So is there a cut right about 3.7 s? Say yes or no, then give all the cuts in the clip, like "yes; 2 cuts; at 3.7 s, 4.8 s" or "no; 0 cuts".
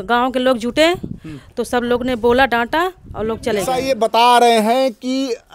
yes; 1 cut; at 3.7 s